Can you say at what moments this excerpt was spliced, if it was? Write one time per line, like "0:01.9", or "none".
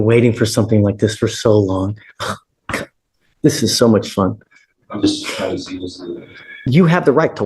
0:06.5